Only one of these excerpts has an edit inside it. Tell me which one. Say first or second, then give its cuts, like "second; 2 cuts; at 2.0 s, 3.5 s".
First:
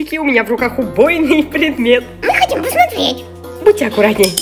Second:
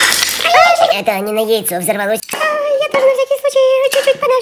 second; 2 cuts; at 0.9 s, 2.3 s